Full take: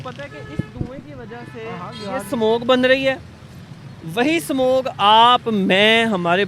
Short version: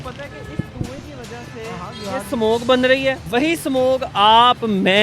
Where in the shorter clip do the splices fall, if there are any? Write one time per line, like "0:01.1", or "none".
0:03.2